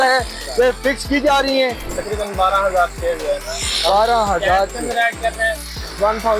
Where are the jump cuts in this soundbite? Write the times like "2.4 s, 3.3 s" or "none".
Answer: 1.9 s